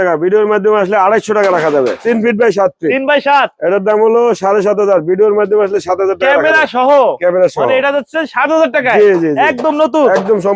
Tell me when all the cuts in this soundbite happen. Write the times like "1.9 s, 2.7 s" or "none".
2.0 s